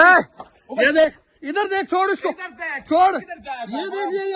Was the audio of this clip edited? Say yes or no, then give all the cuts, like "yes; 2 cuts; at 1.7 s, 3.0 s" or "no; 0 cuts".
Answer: no; 0 cuts